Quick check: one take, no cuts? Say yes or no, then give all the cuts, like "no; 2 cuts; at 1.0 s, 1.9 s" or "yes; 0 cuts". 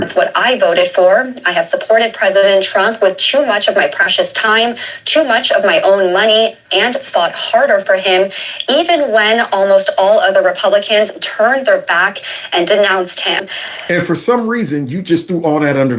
yes; 0 cuts